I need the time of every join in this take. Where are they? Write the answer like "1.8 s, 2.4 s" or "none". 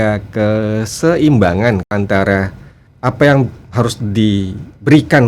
1.9 s